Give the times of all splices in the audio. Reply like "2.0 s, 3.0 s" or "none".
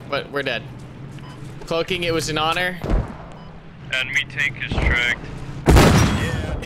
5.6 s